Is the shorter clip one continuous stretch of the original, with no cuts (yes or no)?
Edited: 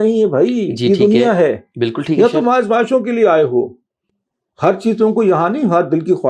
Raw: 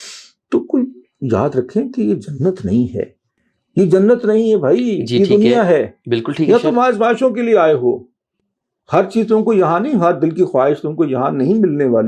yes